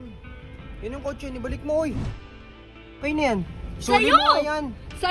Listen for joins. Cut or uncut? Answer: cut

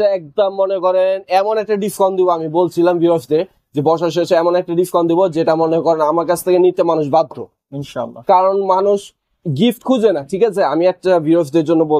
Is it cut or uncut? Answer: uncut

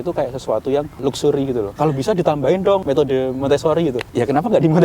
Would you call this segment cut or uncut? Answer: cut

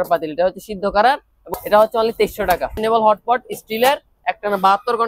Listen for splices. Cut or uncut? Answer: cut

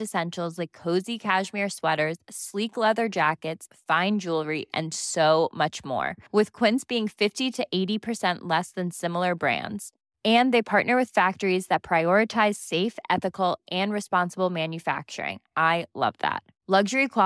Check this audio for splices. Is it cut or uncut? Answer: uncut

